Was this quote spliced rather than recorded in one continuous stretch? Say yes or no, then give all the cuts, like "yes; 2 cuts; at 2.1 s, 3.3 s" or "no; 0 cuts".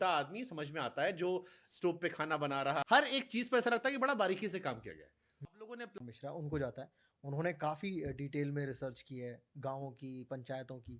yes; 2 cuts; at 2.8 s, 6.0 s